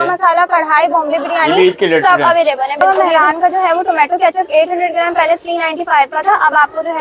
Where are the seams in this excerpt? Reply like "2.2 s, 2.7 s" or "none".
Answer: 2.8 s